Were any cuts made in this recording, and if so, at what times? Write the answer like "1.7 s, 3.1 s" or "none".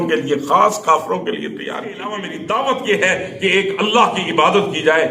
2.3 s